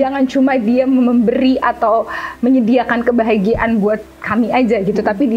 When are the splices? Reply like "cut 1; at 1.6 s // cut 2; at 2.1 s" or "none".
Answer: none